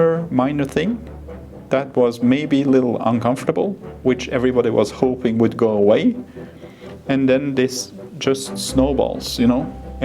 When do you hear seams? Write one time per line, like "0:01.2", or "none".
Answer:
none